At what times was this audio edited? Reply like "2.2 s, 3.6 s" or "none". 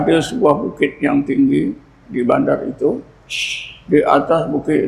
none